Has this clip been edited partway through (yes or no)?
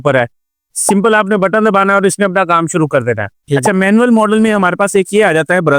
yes